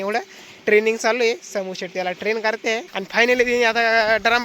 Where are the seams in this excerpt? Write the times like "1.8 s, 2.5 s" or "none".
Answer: 2.9 s